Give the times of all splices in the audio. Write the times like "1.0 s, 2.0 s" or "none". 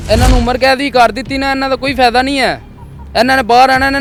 none